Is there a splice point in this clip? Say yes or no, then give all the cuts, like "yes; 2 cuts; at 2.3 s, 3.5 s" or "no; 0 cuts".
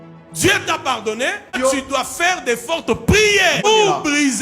yes; 2 cuts; at 1.5 s, 3.6 s